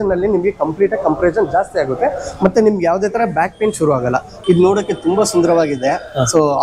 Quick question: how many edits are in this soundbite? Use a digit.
1